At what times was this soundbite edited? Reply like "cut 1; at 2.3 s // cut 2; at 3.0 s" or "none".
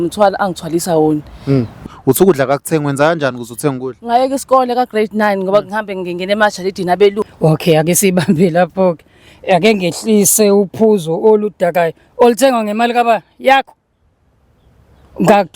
cut 1; at 1.8 s // cut 2; at 7.2 s